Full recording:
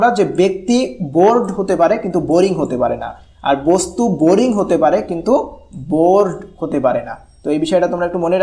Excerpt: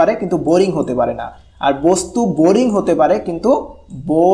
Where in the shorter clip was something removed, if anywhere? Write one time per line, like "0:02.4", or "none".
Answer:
none